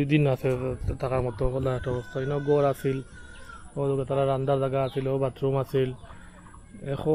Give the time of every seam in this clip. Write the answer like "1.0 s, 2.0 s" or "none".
none